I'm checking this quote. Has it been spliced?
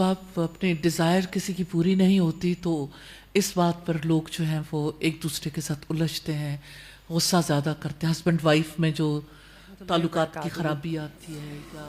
no; 0 cuts

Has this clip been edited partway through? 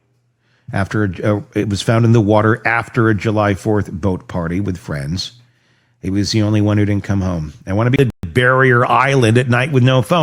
yes; 1 cut; at 8.2 s

